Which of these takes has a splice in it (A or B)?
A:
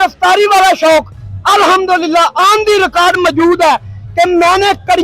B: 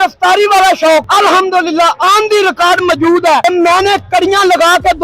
B